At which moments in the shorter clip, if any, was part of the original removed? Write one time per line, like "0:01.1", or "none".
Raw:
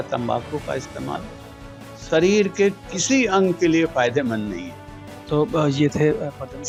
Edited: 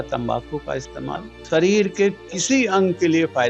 0:01.3